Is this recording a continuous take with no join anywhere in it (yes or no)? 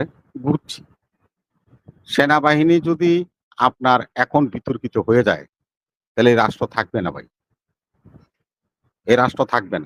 yes